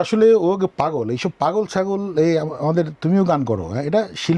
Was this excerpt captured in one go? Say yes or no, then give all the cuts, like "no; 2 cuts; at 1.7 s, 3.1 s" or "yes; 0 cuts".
yes; 0 cuts